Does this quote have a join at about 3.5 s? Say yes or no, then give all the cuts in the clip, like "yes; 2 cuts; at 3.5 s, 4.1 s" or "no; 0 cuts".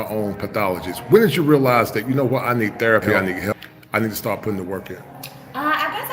yes; 1 cut; at 3.5 s